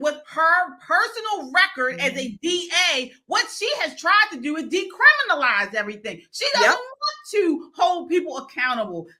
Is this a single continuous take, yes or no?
yes